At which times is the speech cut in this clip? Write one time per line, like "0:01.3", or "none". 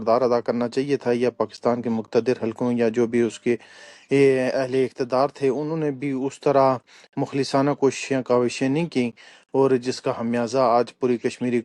none